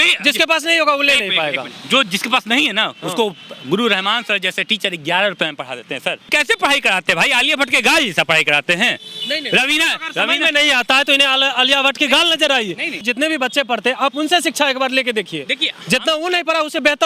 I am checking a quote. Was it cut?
yes; 2 cuts; at 6.3 s, 13.0 s

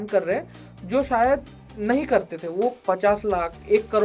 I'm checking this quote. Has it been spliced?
yes; 1 cut; at 2.8 s

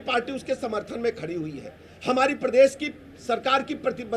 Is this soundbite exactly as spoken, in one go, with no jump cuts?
yes; 0 cuts

